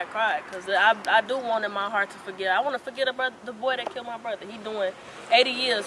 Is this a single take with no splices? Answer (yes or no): yes